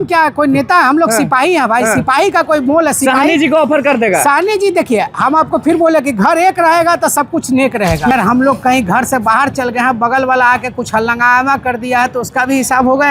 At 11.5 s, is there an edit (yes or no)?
no